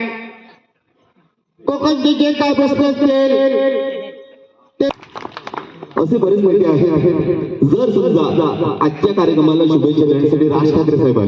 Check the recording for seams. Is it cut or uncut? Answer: cut